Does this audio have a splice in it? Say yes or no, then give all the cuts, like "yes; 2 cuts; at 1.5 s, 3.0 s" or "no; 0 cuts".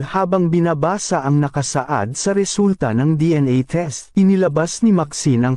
yes; 1 cut; at 3.9 s